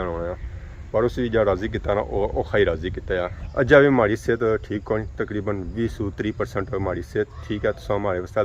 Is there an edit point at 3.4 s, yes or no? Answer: yes